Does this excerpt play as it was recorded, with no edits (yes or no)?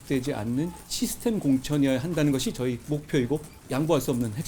no